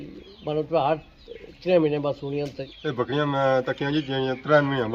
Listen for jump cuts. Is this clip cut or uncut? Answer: cut